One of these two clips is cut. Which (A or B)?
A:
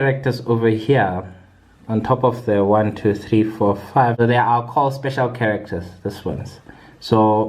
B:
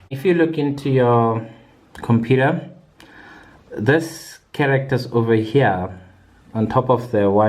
A